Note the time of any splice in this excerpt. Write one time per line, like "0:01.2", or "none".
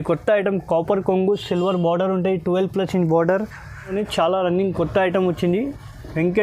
0:03.9